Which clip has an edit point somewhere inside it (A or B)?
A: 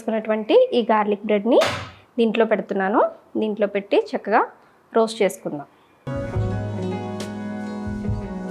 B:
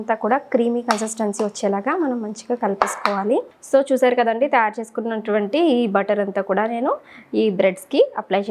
B